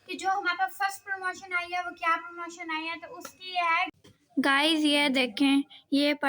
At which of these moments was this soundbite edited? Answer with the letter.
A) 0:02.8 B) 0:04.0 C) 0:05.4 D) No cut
B